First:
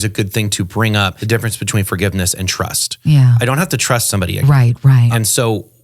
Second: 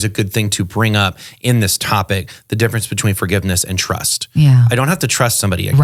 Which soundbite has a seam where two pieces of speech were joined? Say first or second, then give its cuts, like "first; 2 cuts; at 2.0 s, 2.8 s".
first; 2 cuts; at 1.2 s, 5.1 s